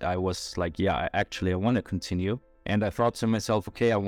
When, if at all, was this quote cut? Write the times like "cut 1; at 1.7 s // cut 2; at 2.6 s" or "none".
cut 1; at 2.5 s